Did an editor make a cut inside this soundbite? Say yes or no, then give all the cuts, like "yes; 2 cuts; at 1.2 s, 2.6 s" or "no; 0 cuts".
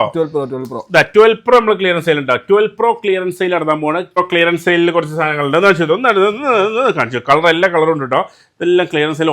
yes; 1 cut; at 4.2 s